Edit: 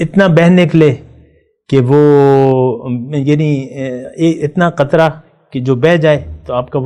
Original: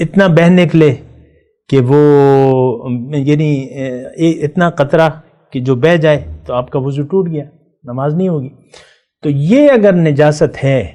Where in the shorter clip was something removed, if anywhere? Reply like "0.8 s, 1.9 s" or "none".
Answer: none